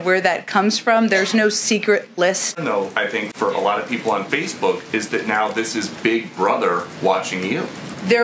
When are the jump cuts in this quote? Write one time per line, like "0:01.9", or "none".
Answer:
0:02.6